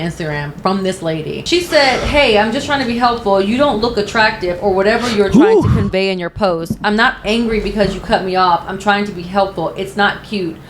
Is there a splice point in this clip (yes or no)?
yes